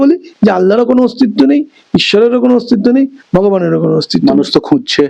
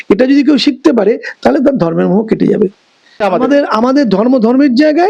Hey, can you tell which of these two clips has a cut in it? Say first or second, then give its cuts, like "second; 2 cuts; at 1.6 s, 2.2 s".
second; 1 cut; at 3.2 s